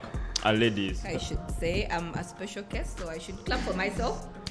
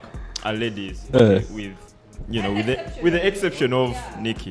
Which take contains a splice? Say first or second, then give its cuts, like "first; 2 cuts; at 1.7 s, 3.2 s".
first; 1 cut; at 1.0 s